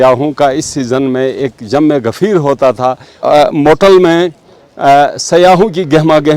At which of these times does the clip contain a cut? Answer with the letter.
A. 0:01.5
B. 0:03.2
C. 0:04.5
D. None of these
B